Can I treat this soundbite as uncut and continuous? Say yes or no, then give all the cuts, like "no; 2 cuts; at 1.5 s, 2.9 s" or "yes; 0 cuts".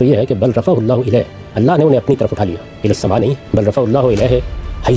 yes; 0 cuts